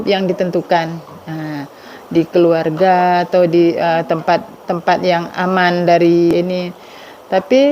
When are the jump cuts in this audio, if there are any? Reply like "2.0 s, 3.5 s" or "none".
6.3 s

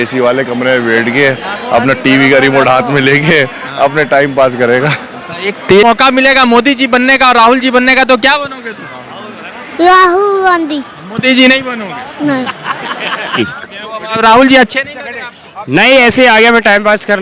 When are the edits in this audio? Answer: 5.8 s, 13.4 s

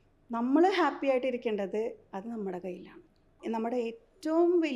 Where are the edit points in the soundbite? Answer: 3.4 s

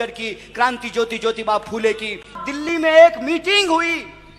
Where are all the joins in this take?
2.4 s

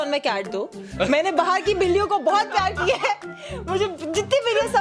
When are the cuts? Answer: none

